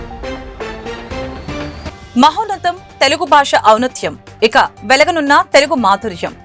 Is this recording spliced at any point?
yes; 1 cut; at 1.9 s

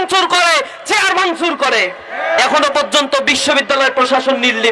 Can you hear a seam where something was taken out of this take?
yes; 1 cut; at 2.4 s

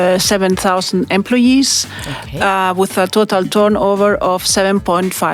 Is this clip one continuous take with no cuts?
yes; 0 cuts

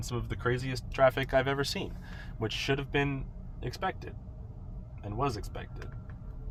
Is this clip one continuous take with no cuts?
yes; 0 cuts

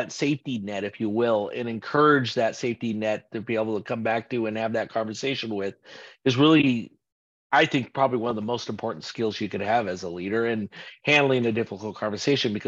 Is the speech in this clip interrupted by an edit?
no; 0 cuts

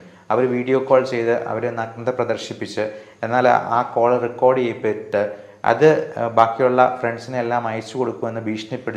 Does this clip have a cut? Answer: no; 0 cuts

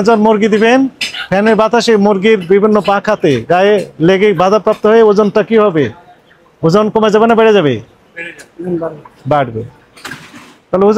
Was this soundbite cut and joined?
no; 0 cuts

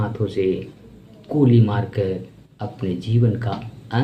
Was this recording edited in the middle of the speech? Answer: no; 0 cuts

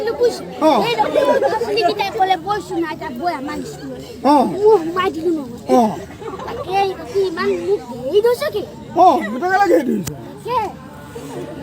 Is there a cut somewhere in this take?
yes; 1 cut; at 1.1 s

